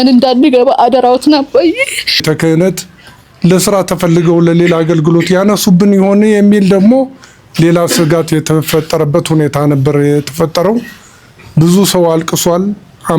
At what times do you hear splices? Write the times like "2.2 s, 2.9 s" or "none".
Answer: 2.2 s